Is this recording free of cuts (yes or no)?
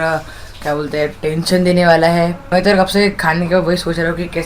no